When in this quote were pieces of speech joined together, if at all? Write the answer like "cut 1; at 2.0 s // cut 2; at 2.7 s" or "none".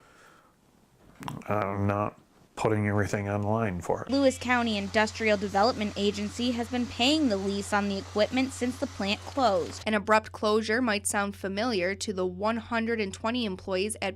cut 1; at 4.1 s // cut 2; at 9.8 s